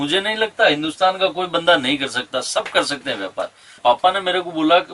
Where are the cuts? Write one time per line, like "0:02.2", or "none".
0:03.8